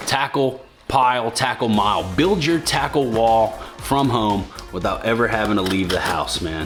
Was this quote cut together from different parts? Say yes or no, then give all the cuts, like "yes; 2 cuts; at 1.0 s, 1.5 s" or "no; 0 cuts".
no; 0 cuts